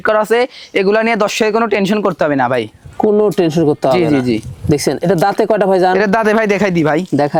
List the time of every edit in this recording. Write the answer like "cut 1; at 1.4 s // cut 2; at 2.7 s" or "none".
none